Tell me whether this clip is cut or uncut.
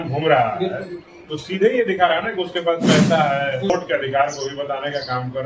cut